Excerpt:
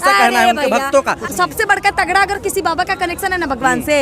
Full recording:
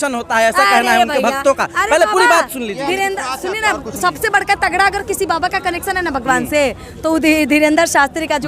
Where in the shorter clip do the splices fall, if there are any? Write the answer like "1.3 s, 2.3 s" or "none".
1.2 s